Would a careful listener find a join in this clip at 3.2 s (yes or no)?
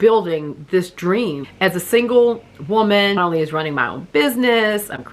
yes